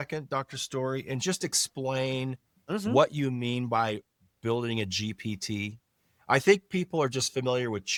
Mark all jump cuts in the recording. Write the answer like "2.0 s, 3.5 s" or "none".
none